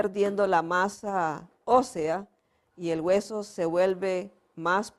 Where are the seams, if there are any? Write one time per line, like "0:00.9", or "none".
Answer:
0:01.0